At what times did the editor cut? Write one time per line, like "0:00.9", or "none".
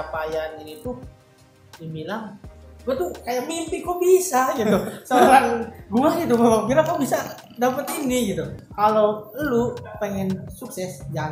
0:08.6